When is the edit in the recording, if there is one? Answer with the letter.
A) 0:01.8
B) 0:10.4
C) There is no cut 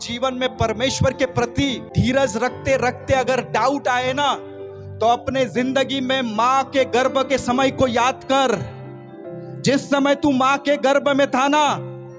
A